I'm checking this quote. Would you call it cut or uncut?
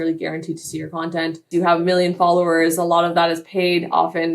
cut